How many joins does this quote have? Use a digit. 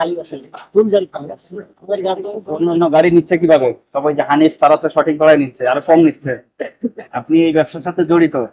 1